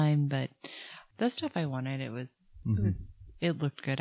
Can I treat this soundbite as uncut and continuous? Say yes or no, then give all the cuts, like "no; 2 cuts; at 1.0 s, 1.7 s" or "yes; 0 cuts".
no; 1 cut; at 1.0 s